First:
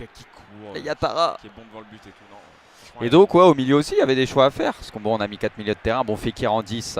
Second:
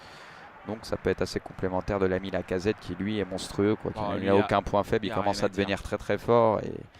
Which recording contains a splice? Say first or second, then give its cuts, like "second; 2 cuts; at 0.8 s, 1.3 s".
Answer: second; 1 cut; at 2.1 s